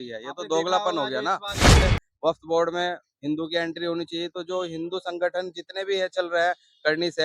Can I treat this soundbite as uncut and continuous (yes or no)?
no